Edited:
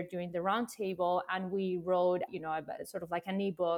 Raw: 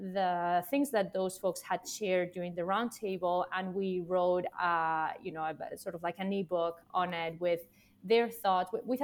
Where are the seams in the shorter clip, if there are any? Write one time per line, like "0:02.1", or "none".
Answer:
0:02.3